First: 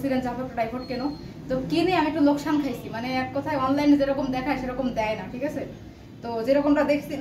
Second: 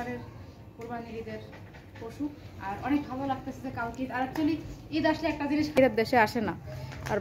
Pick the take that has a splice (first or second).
second